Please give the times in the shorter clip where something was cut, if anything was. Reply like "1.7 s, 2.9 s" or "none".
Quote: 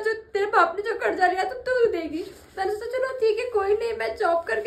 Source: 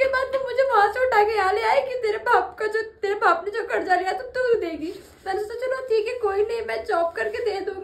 none